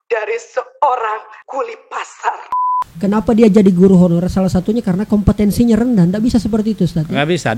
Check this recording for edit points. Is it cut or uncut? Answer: cut